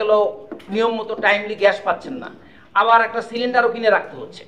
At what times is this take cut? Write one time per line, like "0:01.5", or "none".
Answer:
none